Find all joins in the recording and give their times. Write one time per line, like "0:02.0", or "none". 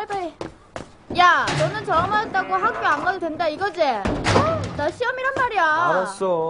none